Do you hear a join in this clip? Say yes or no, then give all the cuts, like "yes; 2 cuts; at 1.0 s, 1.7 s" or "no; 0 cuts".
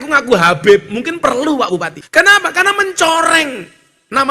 yes; 1 cut; at 2.0 s